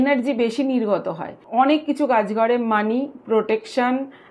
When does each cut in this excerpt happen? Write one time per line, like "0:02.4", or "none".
0:01.4